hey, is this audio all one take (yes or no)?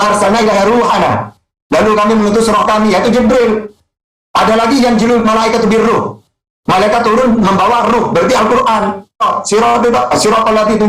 no